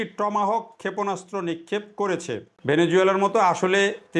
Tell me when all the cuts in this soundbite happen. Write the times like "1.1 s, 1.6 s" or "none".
2.5 s